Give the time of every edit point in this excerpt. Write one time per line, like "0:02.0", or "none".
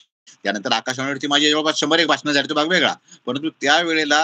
none